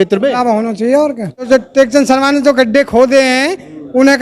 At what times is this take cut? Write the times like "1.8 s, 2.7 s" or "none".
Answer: 1.5 s